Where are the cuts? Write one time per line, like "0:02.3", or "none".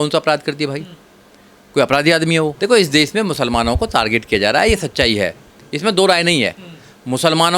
0:02.5